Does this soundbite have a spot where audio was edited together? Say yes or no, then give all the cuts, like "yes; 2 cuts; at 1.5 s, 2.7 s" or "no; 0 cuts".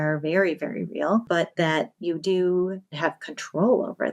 yes; 2 cuts; at 1.2 s, 3.0 s